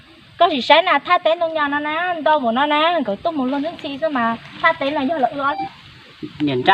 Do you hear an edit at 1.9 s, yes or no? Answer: no